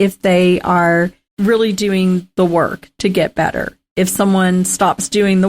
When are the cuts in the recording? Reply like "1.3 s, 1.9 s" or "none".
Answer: 1.2 s